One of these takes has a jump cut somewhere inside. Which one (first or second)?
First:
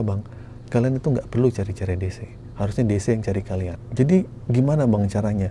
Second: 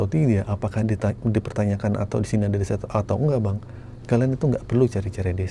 first